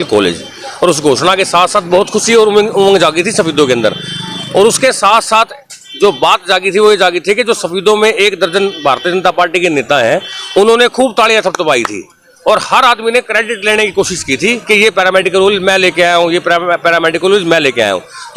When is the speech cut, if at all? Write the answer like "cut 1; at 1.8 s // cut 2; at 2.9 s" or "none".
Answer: none